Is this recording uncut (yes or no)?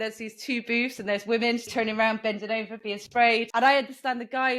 no